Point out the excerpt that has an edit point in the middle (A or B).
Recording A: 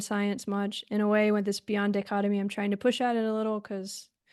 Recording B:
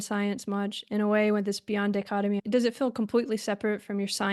B